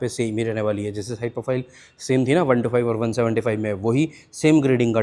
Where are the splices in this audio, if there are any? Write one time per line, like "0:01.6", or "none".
none